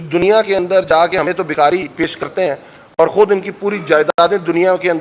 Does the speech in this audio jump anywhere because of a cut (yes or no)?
no